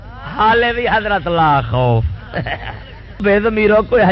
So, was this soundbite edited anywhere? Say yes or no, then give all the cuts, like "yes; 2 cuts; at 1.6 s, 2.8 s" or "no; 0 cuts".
yes; 1 cut; at 3.2 s